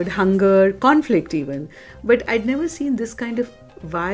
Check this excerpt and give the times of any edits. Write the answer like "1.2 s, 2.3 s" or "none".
none